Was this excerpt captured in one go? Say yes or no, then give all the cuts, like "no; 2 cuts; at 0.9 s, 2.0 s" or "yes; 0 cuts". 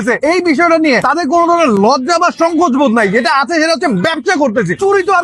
yes; 0 cuts